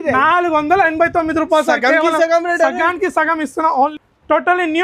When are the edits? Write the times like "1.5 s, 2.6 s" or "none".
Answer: 3.9 s